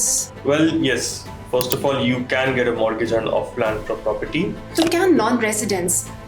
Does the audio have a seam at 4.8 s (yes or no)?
yes